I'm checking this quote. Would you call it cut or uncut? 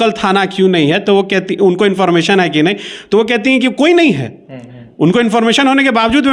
uncut